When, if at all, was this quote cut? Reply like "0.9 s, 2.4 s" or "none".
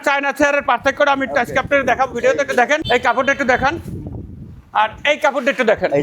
none

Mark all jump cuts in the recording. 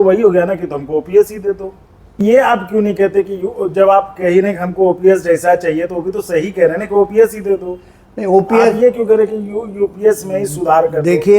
2.2 s

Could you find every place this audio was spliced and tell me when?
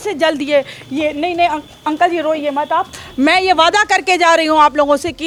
none

